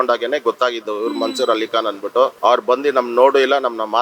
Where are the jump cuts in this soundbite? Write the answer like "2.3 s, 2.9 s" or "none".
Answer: 2.3 s